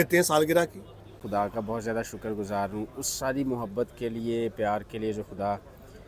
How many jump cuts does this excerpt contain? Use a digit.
1